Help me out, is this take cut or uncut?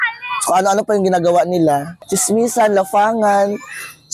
cut